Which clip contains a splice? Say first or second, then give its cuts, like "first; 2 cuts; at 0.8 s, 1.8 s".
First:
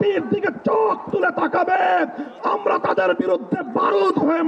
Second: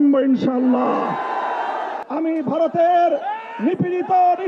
second; 1 cut; at 2.0 s